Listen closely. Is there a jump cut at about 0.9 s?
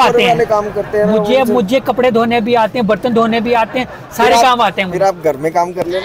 no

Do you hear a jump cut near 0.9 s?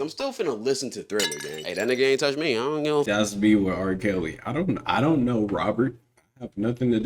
no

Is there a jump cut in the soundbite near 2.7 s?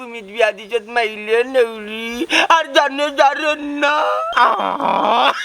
no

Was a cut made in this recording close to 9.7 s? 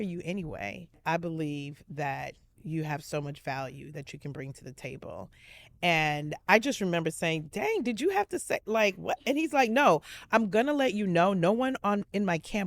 no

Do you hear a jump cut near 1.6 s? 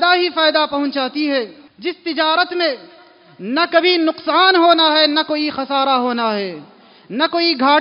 yes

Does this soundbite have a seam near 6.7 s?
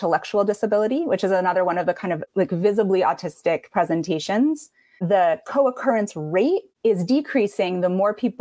yes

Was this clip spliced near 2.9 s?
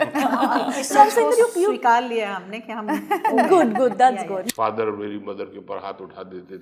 no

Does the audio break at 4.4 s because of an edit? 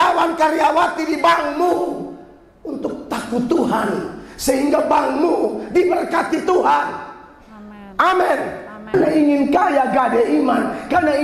no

